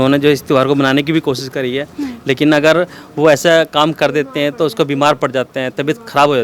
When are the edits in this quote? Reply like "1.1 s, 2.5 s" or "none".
none